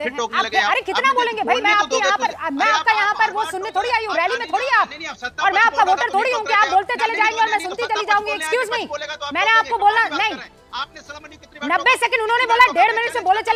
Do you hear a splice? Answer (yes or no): no